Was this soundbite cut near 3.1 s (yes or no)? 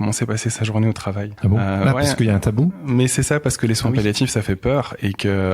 no